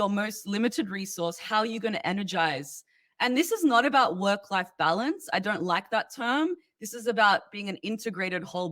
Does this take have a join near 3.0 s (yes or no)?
yes